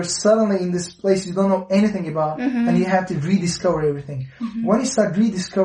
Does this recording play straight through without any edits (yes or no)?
yes